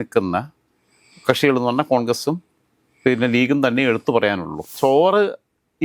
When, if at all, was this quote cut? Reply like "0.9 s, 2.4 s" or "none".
4.6 s